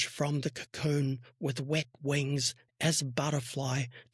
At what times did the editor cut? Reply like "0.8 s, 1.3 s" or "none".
none